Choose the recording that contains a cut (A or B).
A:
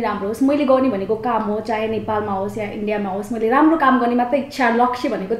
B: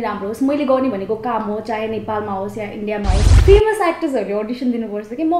B